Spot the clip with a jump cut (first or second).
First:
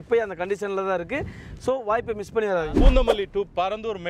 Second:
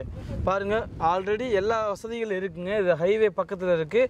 first